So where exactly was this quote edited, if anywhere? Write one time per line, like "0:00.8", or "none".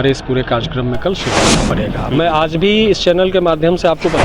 0:01.7